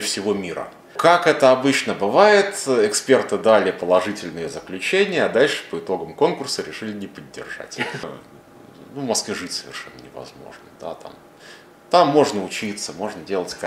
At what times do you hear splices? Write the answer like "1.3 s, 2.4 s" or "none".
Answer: 0.9 s, 8.1 s